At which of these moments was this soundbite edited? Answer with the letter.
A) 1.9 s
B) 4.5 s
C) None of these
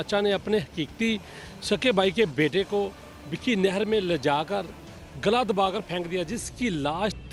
C